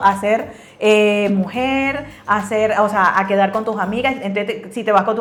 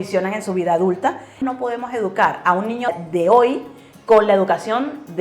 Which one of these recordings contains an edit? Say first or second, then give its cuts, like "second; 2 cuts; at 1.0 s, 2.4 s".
second; 2 cuts; at 1.3 s, 2.9 s